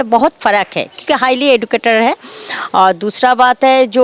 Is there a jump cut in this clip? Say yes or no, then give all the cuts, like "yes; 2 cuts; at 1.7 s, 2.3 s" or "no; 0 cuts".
no; 0 cuts